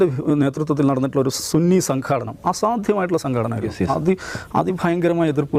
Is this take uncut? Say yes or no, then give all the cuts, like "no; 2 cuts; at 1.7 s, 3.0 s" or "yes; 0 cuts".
yes; 0 cuts